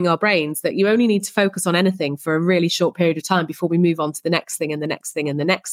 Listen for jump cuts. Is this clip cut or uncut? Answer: uncut